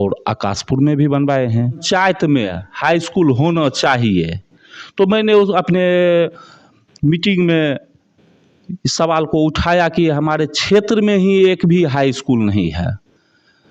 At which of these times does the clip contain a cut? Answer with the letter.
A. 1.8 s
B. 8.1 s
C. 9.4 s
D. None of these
A